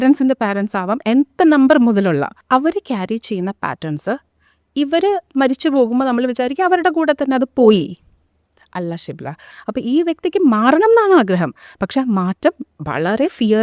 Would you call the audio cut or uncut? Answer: cut